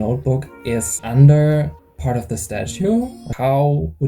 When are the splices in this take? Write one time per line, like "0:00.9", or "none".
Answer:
0:01.0
0:01.9
0:03.2